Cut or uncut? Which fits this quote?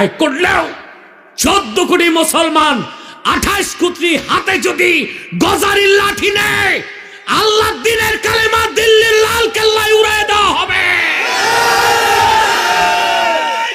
uncut